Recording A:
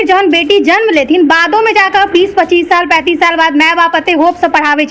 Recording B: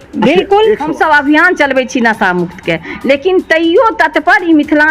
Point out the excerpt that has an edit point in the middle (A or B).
B